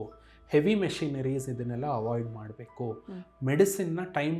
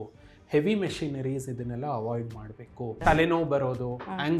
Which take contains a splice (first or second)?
second